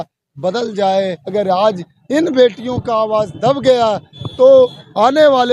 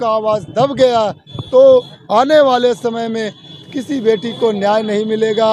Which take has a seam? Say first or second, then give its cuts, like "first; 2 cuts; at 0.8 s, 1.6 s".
first; 1 cut; at 1.2 s